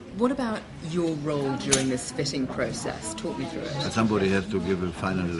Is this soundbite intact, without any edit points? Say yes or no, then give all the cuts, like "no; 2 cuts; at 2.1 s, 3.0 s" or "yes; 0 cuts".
yes; 0 cuts